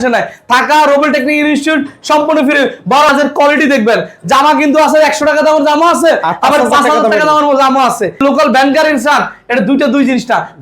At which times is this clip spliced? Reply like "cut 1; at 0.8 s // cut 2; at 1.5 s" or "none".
cut 1; at 3.1 s // cut 2; at 8.2 s